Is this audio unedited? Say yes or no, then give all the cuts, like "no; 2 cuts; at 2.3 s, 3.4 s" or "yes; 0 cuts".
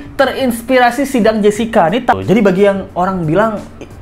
no; 1 cut; at 2.1 s